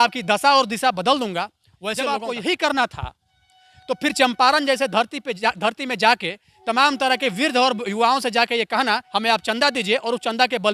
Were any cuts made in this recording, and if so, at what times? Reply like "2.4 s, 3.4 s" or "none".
2.0 s, 9.1 s